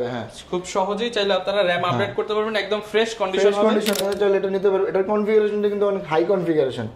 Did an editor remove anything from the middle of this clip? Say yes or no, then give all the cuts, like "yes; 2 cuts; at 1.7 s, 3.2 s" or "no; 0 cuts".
yes; 1 cut; at 4.0 s